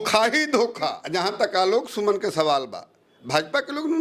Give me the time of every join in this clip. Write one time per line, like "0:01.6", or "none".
0:01.0